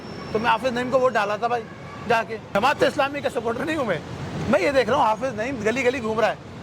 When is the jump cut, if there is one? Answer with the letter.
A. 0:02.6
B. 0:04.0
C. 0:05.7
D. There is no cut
A